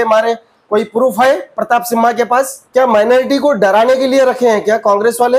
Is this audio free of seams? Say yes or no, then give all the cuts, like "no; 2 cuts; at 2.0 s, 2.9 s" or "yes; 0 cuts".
no; 1 cut; at 2.6 s